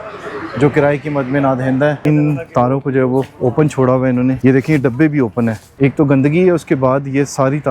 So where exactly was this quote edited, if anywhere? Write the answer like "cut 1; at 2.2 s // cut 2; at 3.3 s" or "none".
cut 1; at 2.0 s // cut 2; at 4.4 s // cut 3; at 5.6 s